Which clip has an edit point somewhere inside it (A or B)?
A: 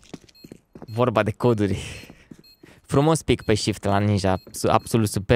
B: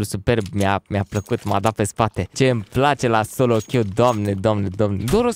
B